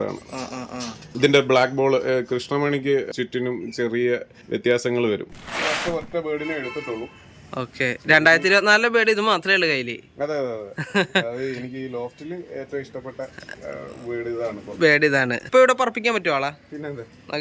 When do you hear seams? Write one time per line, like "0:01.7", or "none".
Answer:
0:01.0
0:03.1
0:04.3
0:05.3
0:15.4